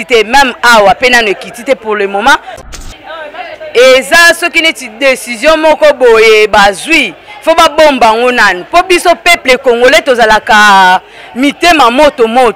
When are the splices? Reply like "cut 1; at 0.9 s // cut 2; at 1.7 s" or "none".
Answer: cut 1; at 2.6 s